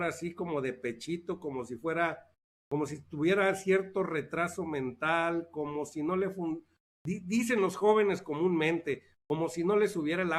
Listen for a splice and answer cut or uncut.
uncut